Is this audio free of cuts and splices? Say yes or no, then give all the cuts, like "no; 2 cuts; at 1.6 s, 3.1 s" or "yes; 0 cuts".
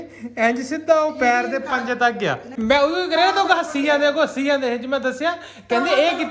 no; 1 cut; at 2.5 s